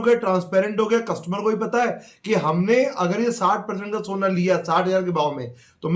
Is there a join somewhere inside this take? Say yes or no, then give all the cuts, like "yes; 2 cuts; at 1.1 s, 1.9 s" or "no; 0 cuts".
no; 0 cuts